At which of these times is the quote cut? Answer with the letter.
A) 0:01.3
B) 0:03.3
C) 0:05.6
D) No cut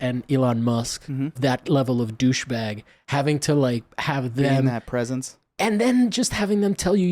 A